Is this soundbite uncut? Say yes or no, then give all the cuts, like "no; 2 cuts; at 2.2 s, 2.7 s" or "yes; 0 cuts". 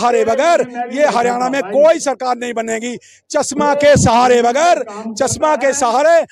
yes; 0 cuts